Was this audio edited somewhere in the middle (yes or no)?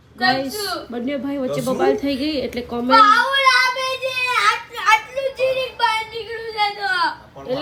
no